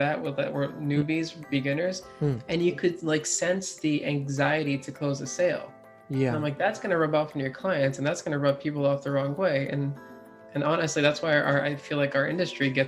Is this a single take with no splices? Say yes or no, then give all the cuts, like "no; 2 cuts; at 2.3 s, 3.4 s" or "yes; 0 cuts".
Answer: yes; 0 cuts